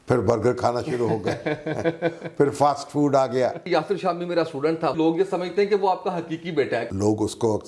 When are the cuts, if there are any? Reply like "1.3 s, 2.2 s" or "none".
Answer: 3.7 s, 5.0 s, 6.8 s